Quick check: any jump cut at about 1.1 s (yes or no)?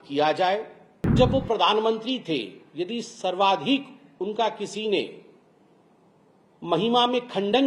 yes